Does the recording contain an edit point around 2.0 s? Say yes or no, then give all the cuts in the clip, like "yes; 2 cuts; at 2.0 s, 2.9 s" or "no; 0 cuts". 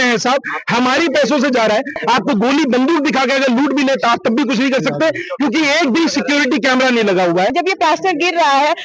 yes; 2 cuts; at 2.0 s, 7.5 s